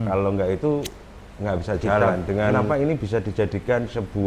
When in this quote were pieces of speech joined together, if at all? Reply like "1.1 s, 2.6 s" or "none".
2.6 s